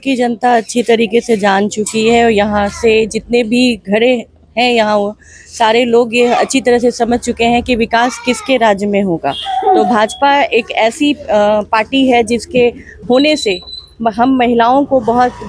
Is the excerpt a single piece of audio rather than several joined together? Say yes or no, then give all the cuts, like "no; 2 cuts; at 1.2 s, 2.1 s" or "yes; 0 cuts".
yes; 0 cuts